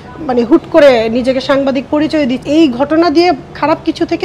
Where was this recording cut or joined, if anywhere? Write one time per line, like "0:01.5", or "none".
0:02.4

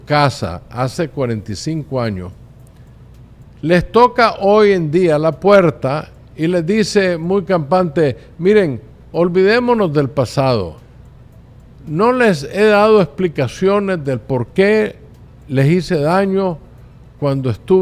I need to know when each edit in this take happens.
none

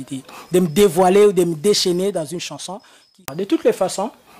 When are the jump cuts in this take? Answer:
0:03.3

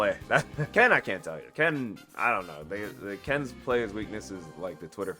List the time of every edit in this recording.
none

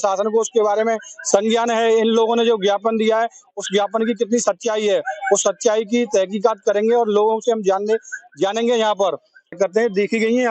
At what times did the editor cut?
0:09.5

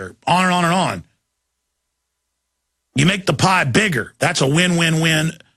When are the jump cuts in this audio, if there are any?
0:02.5

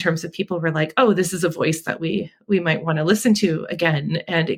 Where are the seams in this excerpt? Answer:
none

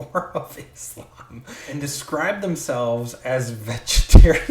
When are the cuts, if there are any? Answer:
0:01.6

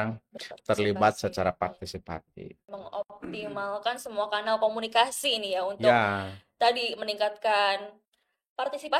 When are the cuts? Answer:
0:02.7

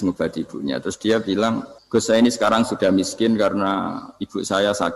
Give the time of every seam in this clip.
0:01.7

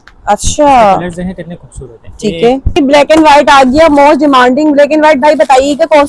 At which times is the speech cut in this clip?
0:02.8

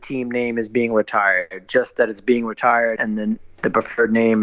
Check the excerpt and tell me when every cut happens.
0:03.0

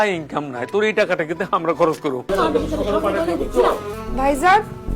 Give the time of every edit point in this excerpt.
0:02.2
0:03.9

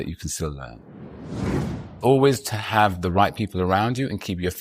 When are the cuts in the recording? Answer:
0:01.3

